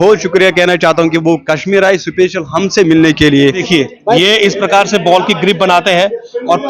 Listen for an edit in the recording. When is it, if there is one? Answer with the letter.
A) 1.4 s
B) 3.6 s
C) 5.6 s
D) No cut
B